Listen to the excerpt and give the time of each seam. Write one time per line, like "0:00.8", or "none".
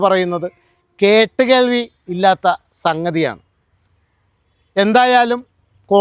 none